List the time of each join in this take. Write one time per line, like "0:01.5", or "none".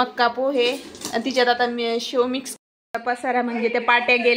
0:02.5